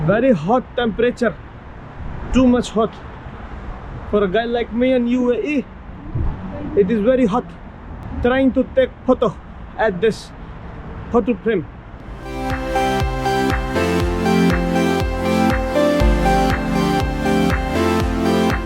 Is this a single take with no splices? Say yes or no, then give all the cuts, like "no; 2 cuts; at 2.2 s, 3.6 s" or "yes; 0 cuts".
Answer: yes; 0 cuts